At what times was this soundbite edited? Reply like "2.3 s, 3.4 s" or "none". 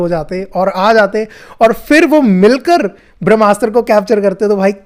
none